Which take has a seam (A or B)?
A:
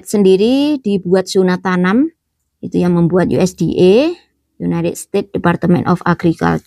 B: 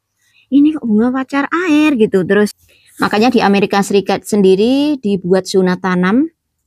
B